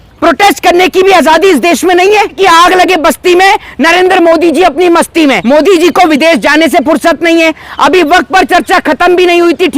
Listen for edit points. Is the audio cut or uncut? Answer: cut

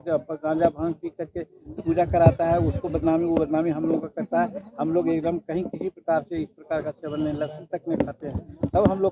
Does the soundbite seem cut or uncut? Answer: uncut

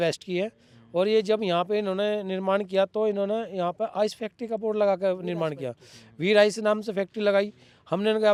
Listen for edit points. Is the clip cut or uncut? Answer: uncut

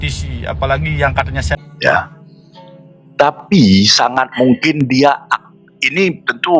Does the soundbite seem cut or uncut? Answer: cut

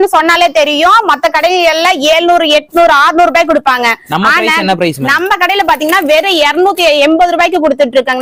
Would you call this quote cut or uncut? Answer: uncut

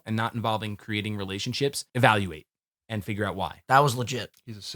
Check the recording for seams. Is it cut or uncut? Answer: cut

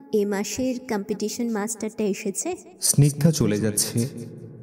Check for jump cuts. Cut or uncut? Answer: cut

